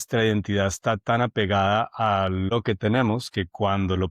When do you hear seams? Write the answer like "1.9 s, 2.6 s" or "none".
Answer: 2.5 s